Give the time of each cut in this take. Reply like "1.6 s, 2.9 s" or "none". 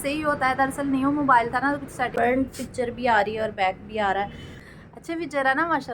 2.1 s, 4.6 s